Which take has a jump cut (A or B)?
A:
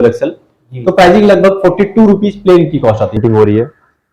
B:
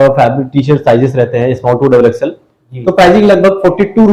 A